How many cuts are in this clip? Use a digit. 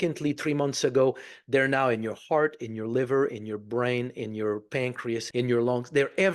1